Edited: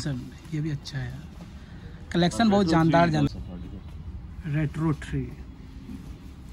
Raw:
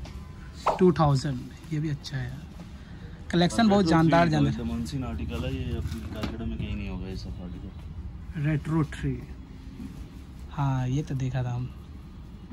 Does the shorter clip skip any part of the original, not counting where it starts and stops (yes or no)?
yes